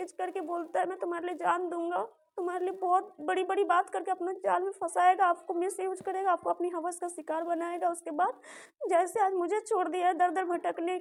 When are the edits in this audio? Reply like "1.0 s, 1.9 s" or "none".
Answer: none